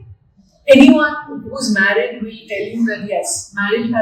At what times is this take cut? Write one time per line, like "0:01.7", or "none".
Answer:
none